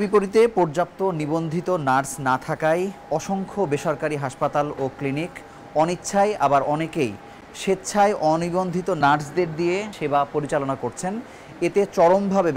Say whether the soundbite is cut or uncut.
uncut